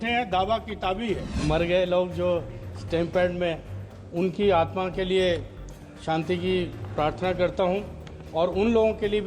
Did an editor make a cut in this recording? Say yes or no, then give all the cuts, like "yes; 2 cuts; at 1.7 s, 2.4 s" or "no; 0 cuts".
yes; 1 cut; at 1.4 s